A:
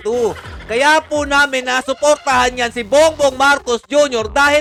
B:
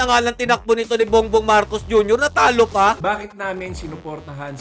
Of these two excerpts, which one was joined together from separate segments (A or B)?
B